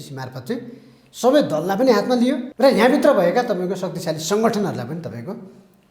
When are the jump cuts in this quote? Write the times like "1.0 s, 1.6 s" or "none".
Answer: 2.5 s